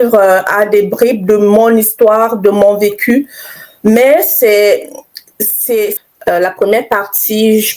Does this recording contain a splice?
yes; 1 cut; at 5.9 s

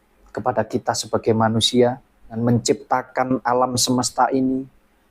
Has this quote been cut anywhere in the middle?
yes; 1 cut; at 2.4 s

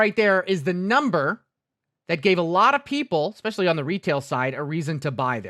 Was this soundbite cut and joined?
no; 0 cuts

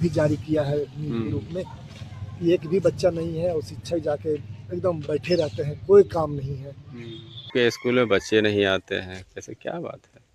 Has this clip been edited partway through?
yes; 1 cut; at 7.5 s

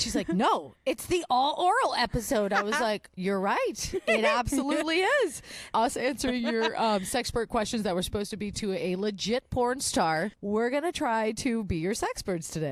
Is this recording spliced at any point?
yes; 2 cuts; at 5.7 s, 10.4 s

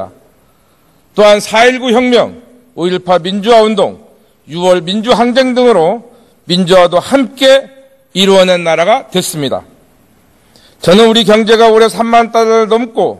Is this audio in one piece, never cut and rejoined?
yes; 0 cuts

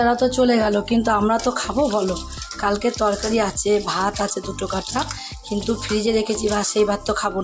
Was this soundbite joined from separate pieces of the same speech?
no; 0 cuts

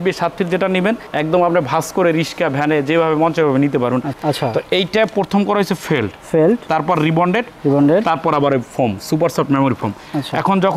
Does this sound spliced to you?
yes; 1 cut; at 4.1 s

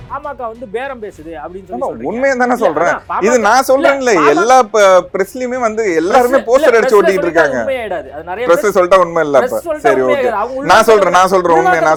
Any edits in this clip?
no; 0 cuts

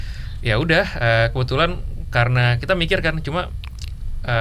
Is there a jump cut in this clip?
no; 0 cuts

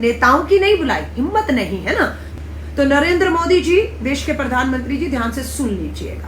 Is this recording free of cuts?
no; 1 cut; at 2.2 s

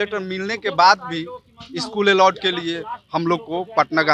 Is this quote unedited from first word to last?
yes; 0 cuts

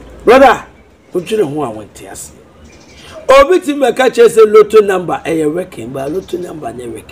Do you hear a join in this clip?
no; 0 cuts

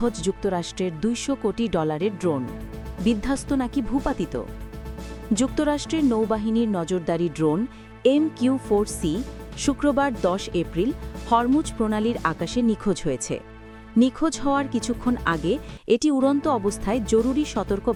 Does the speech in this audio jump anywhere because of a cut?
no; 0 cuts

